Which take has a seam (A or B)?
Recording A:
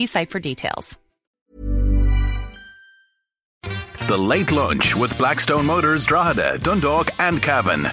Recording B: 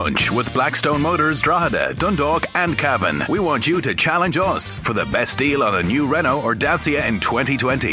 A